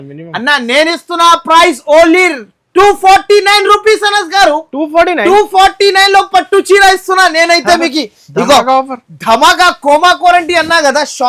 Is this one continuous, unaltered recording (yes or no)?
yes